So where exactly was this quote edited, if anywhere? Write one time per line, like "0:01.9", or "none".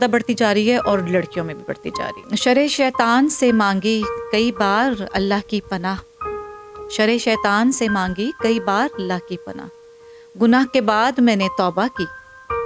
0:02.2